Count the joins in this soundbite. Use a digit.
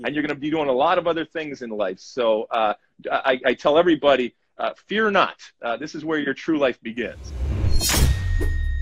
1